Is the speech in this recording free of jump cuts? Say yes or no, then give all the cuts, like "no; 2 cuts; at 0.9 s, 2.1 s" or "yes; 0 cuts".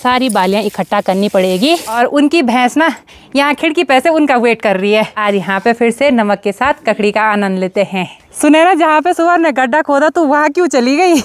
no; 3 cuts; at 1.9 s, 5.1 s, 8.2 s